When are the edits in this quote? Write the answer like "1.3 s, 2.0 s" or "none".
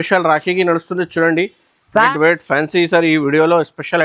2.1 s